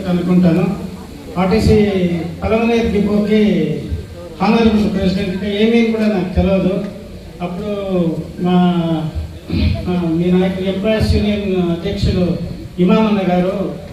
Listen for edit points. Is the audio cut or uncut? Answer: uncut